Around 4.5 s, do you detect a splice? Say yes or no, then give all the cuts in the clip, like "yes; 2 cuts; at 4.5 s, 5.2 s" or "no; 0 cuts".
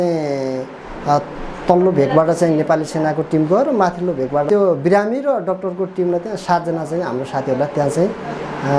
yes; 1 cut; at 4.5 s